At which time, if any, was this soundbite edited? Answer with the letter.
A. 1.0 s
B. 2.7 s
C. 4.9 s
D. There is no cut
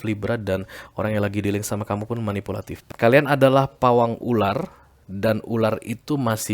B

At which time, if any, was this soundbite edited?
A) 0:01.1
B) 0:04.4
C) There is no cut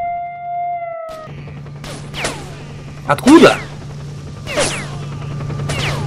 A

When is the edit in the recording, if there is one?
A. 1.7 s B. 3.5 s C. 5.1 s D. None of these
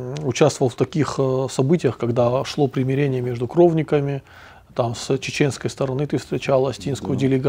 D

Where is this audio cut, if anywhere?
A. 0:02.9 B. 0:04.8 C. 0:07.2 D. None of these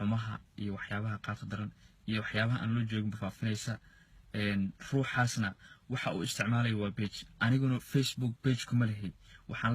A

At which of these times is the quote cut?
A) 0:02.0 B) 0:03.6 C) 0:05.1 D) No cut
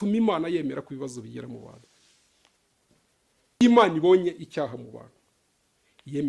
B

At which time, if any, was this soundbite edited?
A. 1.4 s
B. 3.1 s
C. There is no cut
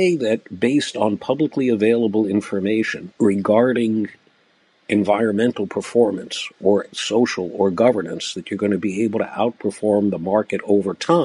B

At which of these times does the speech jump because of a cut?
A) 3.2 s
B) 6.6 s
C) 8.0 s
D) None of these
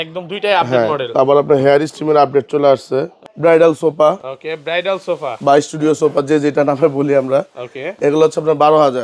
A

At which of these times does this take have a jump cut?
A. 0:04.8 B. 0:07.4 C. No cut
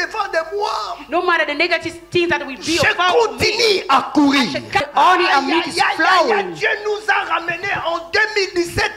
A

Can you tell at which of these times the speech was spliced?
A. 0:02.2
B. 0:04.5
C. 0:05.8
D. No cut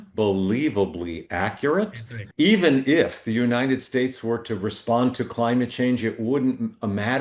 A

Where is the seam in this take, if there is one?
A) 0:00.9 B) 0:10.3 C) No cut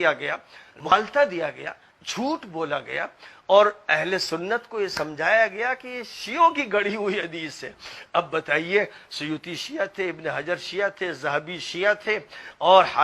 A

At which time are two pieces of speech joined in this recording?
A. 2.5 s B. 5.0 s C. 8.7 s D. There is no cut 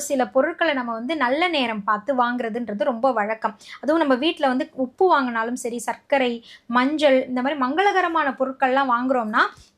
D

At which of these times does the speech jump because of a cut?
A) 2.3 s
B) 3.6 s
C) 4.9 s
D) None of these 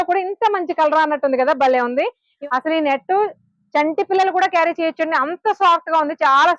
A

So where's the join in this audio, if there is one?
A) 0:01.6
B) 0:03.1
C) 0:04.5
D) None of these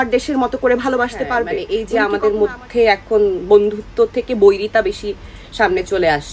A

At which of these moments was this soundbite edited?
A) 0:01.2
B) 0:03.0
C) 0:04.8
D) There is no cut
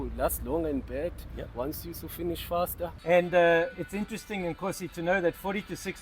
B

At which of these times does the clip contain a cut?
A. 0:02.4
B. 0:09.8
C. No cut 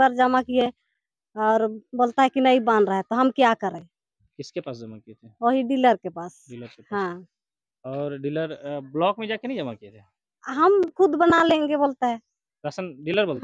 C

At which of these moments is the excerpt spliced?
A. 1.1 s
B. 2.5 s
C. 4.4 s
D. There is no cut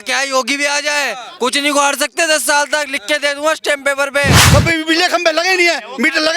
C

